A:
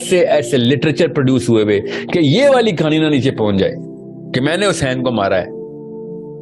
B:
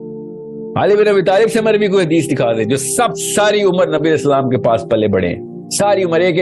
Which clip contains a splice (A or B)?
A